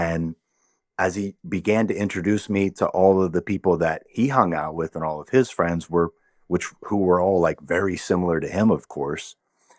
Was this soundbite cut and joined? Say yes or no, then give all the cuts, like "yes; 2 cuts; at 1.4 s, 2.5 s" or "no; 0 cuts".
no; 0 cuts